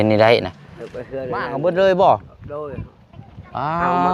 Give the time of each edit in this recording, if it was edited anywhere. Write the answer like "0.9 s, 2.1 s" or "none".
1.5 s